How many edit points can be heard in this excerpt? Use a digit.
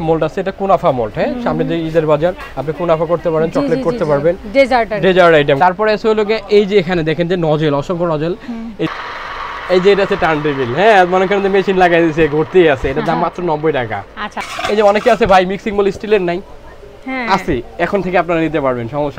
3